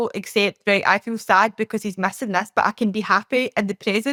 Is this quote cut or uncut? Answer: uncut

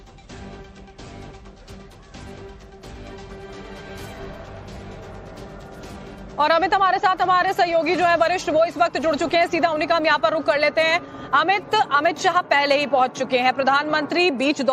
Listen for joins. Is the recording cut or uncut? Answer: uncut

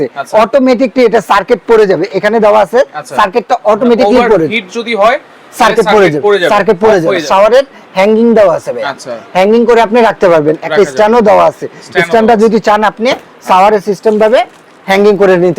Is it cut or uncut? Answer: cut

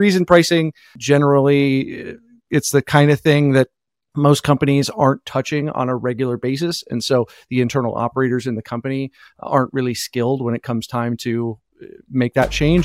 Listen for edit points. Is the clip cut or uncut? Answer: uncut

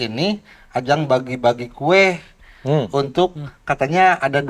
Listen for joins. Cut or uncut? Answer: uncut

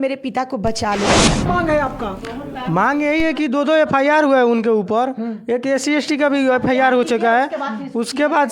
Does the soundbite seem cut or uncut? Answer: cut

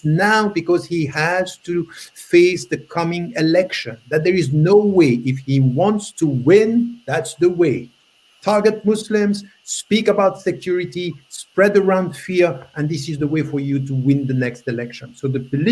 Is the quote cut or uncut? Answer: uncut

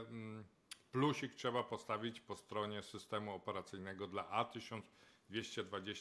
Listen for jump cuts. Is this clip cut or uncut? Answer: uncut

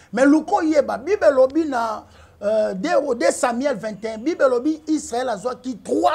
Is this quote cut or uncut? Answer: uncut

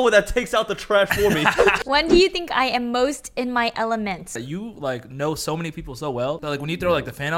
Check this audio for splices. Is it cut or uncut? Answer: cut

